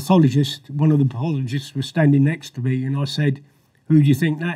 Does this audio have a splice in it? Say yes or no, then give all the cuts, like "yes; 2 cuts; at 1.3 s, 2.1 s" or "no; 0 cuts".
no; 0 cuts